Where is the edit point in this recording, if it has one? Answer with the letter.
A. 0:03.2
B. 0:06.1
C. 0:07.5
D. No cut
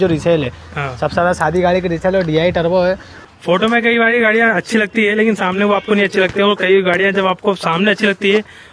A